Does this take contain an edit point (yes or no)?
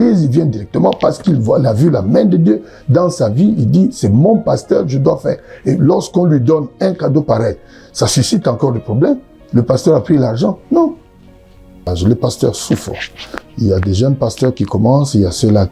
yes